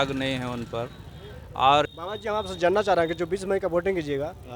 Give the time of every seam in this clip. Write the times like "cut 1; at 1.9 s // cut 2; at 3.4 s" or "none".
cut 1; at 1.8 s

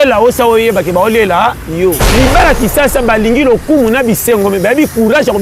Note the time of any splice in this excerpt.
cut 1; at 2.0 s

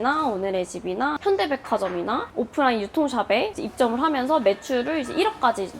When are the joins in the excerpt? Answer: cut 1; at 1.2 s

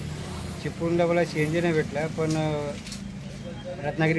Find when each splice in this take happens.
none

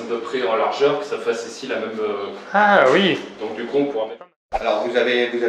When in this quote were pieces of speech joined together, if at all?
cut 1; at 4.2 s

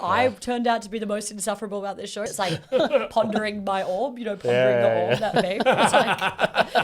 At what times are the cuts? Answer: cut 1; at 2.3 s

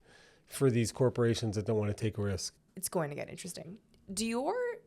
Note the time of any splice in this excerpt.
cut 1; at 2.5 s

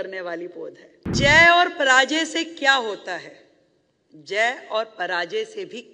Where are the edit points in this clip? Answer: cut 1; at 1.1 s

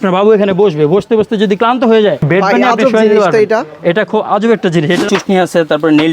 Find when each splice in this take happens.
cut 1; at 2.2 s // cut 2; at 5.0 s

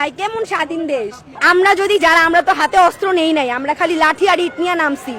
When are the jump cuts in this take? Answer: cut 1; at 1.3 s

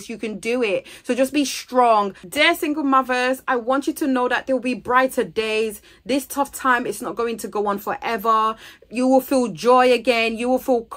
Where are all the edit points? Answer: cut 1; at 2.2 s

